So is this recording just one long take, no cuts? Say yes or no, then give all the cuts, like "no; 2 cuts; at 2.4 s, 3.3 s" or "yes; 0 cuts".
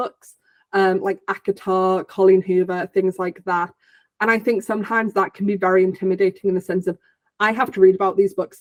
yes; 0 cuts